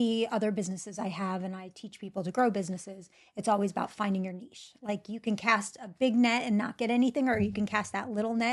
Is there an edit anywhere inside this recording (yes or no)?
no